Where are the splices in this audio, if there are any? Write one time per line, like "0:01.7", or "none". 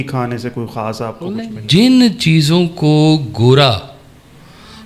0:01.4

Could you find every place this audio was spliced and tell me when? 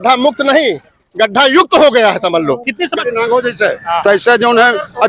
0:03.0

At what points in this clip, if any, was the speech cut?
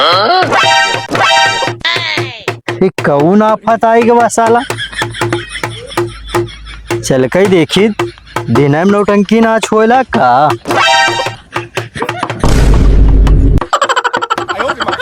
none

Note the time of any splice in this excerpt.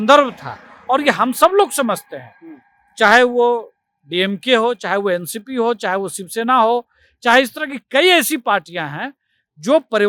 none

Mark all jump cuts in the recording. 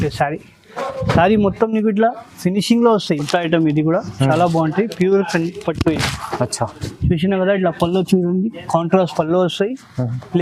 0:03.2

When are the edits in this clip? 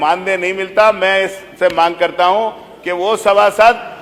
none

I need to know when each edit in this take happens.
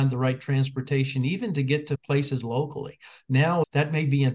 0:02.0
0:03.6

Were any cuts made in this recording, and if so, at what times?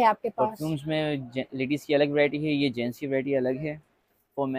none

